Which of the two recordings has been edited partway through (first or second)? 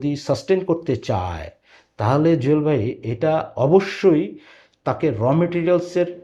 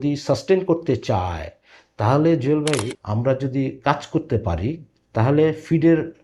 second